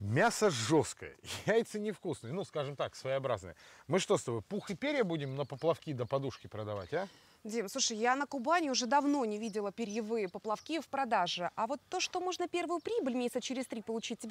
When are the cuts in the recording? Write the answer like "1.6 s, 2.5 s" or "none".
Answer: none

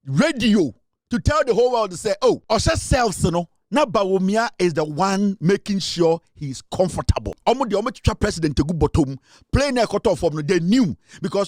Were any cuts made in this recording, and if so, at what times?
2.4 s, 7.3 s

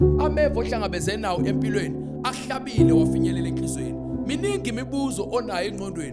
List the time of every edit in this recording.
none

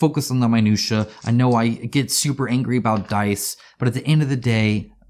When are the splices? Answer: none

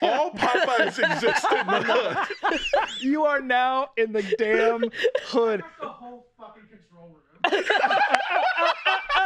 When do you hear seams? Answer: 3.0 s

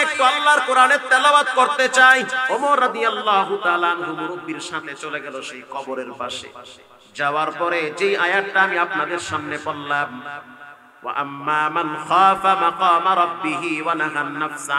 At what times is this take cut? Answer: 2.4 s

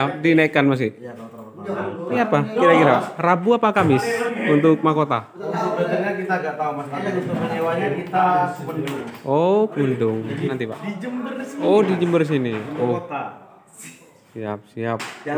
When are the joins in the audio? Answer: 2.2 s, 10.5 s

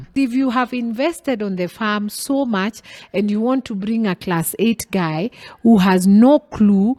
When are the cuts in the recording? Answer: none

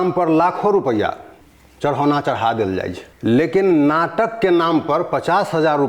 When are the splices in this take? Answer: 1.4 s, 3.0 s

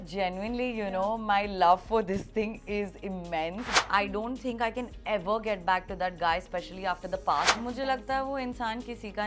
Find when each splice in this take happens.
3.7 s, 7.5 s

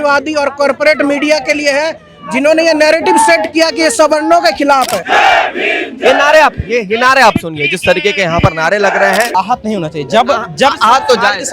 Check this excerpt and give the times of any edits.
5.0 s, 9.3 s

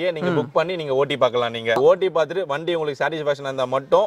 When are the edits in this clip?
1.8 s

